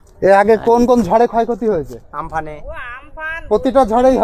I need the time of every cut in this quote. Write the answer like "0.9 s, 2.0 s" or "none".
none